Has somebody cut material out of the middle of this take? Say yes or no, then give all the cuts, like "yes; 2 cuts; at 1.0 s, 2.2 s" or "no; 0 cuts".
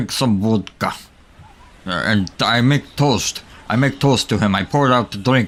no; 0 cuts